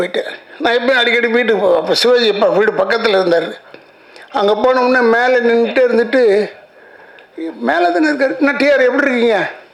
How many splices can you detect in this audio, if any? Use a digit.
0